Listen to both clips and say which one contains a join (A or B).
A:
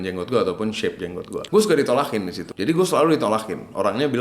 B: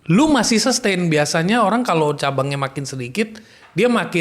A